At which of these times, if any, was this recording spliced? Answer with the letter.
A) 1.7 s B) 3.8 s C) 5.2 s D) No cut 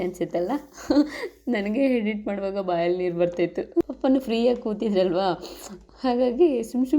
B